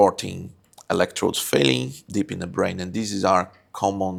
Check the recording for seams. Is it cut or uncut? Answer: uncut